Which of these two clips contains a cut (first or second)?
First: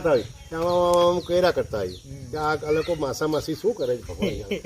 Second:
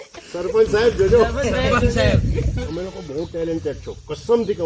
second